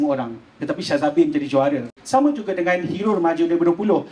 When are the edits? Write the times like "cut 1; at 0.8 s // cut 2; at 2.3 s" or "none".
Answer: cut 1; at 2.0 s